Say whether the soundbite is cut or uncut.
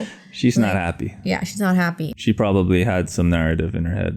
cut